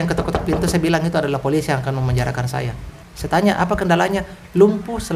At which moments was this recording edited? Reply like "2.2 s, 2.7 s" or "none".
2.9 s